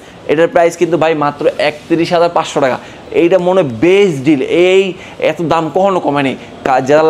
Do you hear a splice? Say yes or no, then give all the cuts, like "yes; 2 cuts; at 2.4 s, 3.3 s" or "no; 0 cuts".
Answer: no; 0 cuts